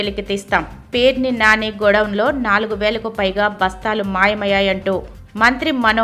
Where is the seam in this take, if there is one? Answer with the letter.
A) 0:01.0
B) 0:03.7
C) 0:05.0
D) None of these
D